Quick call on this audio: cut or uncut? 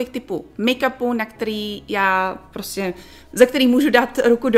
uncut